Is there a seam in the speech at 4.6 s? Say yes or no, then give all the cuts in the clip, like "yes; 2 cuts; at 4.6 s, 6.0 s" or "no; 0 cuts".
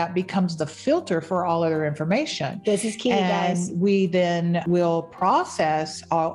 yes; 1 cut; at 4.6 s